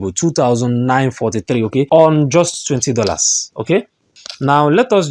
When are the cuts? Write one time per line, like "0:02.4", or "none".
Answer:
0:01.9
0:04.1